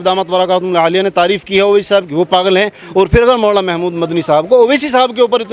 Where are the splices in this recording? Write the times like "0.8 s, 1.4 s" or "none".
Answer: none